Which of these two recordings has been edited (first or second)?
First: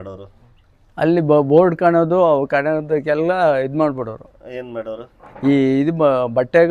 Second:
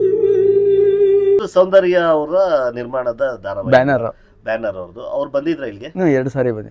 second